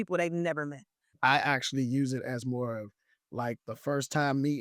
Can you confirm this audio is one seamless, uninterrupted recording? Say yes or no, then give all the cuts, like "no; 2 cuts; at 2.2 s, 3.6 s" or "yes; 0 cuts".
no; 1 cut; at 1.1 s